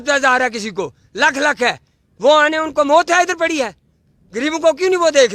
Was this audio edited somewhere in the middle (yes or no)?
no